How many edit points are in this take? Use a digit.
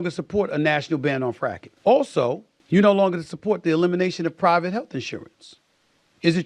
2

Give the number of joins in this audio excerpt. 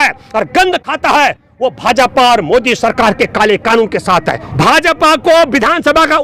1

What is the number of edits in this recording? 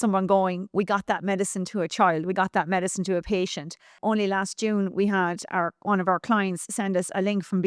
1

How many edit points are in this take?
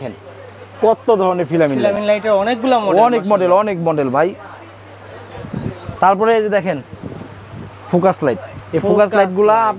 0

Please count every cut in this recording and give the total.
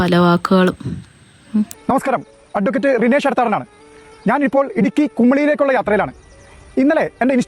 1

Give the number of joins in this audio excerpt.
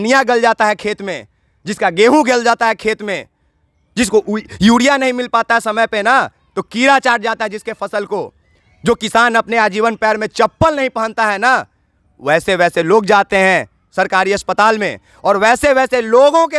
0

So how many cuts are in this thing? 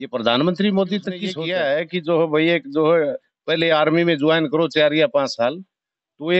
1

